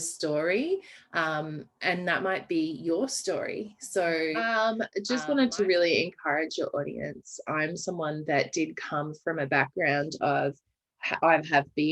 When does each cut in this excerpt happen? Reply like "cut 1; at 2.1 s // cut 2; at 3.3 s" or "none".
cut 1; at 4.4 s